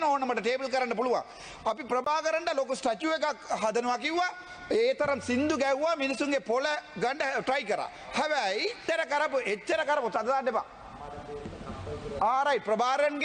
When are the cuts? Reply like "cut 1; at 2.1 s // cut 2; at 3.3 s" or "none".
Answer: cut 1; at 8.8 s